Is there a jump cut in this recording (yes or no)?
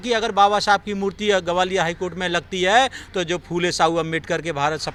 no